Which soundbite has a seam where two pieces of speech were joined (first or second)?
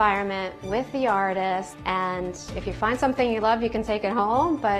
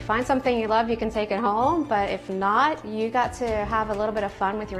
first